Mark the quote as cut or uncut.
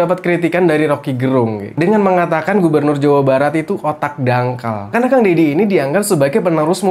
uncut